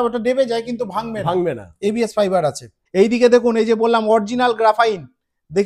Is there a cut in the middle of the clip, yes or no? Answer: yes